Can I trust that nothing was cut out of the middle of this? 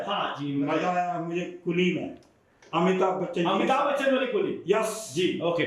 yes; 0 cuts

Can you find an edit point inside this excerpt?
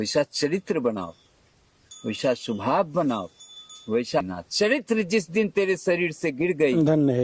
yes; 1 cut; at 4.2 s

